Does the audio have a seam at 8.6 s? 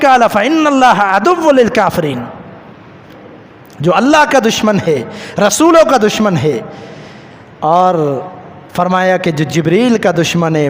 no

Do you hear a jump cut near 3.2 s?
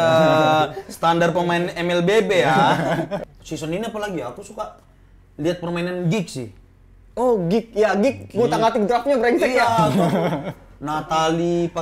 yes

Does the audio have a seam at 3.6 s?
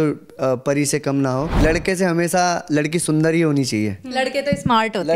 no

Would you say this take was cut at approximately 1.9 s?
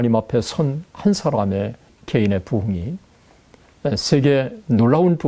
yes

